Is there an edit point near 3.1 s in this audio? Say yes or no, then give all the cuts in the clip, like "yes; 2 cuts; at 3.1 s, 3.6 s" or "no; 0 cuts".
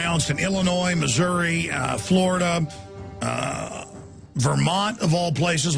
yes; 1 cut; at 3.1 s